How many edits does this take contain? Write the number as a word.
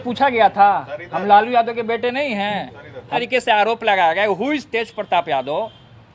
one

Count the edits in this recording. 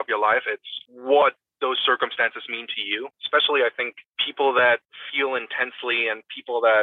two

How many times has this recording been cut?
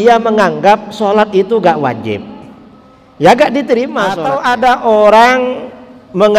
one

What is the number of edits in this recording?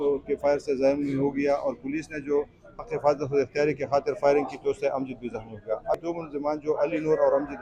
one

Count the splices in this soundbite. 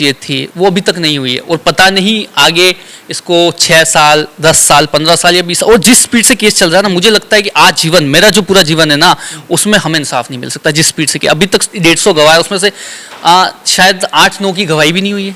zero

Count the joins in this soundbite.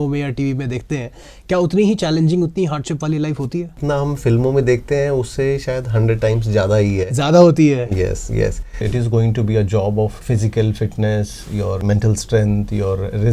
four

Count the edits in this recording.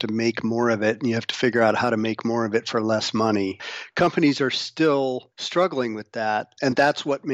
three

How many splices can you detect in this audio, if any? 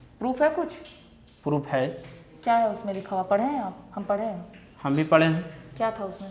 zero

